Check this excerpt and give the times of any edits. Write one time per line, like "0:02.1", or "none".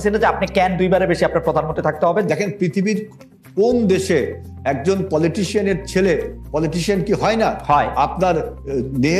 0:02.3